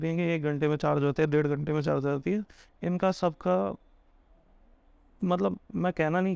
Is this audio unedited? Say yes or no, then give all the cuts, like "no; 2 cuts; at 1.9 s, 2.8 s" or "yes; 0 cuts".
yes; 0 cuts